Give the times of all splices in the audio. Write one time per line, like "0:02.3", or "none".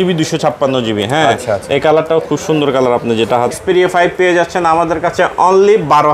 0:03.5